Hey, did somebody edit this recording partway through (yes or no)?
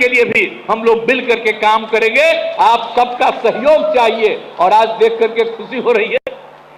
no